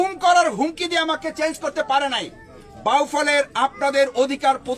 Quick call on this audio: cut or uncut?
uncut